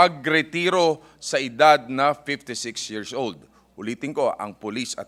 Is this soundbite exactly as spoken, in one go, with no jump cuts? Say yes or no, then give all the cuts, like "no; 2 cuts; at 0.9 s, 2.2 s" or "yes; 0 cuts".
yes; 0 cuts